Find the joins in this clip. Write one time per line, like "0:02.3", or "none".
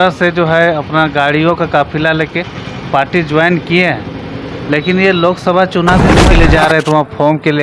0:06.2